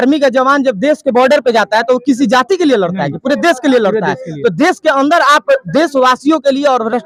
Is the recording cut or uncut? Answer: uncut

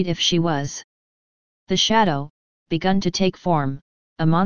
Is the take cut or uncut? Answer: cut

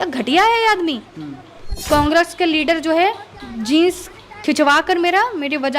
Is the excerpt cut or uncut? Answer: cut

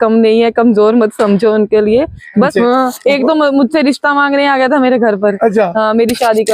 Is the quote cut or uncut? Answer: cut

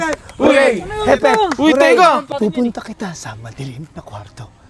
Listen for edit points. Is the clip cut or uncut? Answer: cut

